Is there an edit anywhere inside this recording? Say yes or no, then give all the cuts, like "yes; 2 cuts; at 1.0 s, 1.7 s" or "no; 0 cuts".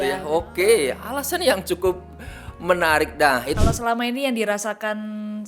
yes; 1 cut; at 3.6 s